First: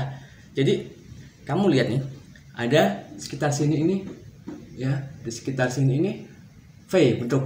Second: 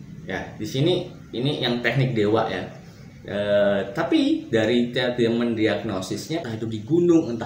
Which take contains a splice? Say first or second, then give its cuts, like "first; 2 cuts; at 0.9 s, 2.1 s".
second; 1 cut; at 6.4 s